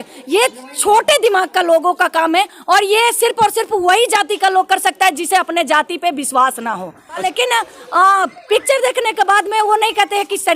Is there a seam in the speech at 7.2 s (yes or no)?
yes